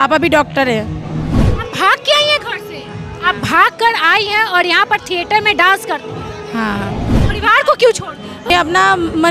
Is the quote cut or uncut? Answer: cut